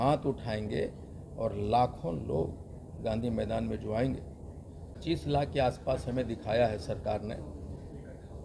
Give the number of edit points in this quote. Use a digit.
1